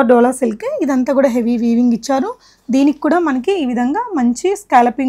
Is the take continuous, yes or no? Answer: yes